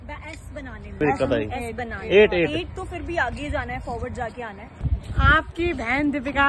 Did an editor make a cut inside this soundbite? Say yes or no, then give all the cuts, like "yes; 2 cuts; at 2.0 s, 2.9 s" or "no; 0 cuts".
yes; 2 cuts; at 1.0 s, 4.7 s